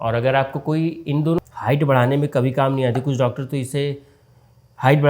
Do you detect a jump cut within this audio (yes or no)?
yes